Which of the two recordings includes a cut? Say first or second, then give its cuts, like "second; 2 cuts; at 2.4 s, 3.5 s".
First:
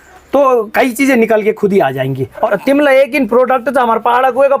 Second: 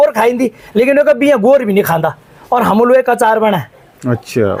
first; 1 cut; at 2.4 s